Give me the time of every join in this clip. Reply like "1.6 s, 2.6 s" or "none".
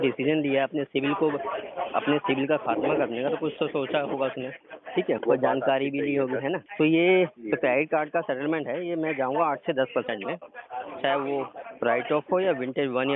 5.2 s, 6.7 s